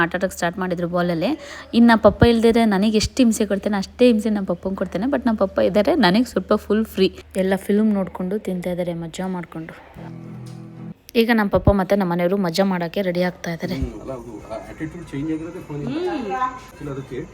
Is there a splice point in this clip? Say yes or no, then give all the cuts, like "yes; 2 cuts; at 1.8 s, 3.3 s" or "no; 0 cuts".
yes; 2 cuts; at 7.2 s, 10.9 s